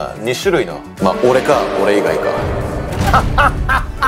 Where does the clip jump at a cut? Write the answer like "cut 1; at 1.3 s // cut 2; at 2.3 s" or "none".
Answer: none